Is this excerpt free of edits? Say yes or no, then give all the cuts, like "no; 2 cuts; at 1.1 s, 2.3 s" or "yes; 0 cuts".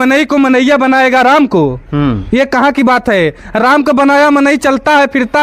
yes; 0 cuts